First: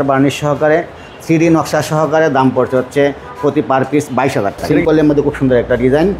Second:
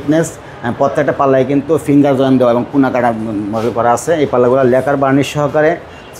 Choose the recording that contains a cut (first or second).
first